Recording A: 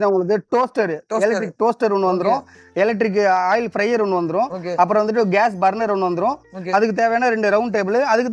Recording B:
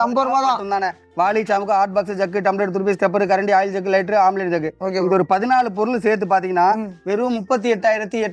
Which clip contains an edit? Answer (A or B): B